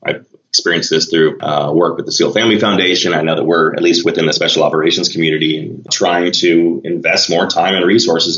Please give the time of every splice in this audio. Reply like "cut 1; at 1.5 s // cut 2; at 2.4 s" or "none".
cut 1; at 1.4 s // cut 2; at 5.9 s